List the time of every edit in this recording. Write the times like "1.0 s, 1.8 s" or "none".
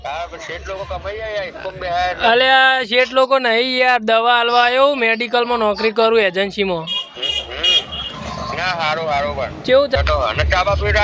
10.0 s